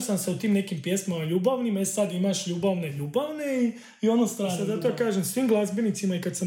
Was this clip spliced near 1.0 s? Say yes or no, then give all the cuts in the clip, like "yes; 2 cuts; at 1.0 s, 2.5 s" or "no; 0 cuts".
no; 1 cut; at 4.6 s